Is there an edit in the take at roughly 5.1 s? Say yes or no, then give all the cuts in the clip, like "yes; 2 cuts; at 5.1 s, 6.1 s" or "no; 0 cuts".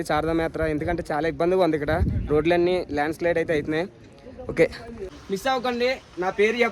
yes; 1 cut; at 5.1 s